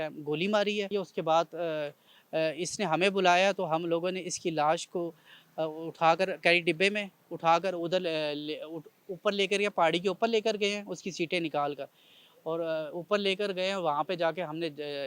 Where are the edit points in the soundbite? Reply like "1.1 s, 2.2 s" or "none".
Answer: 0.9 s